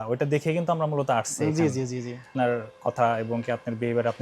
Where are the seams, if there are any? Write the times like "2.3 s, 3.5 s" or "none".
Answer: 2.3 s